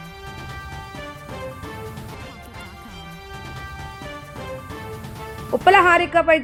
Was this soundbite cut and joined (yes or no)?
no